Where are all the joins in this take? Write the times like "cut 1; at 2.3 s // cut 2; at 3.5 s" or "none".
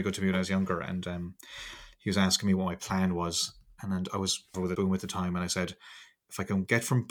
cut 1; at 4.7 s